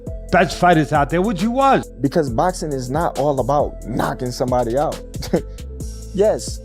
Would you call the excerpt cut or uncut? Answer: cut